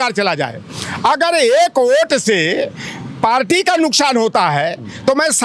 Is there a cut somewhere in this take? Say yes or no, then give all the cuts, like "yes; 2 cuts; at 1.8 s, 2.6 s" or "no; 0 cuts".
no; 0 cuts